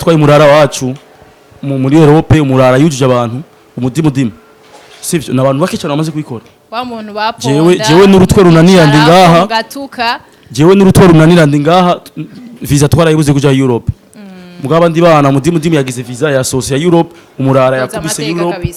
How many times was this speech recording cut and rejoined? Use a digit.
0